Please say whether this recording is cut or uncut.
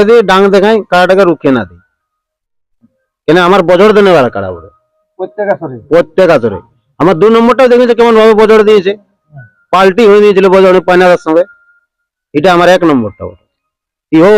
uncut